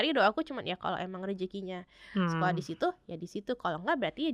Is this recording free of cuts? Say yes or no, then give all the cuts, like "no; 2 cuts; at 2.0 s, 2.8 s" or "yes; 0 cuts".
yes; 0 cuts